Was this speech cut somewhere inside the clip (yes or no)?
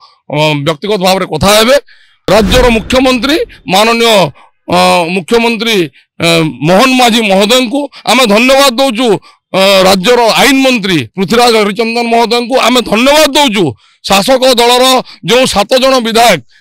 yes